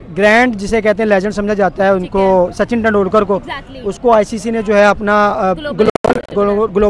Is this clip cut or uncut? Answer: uncut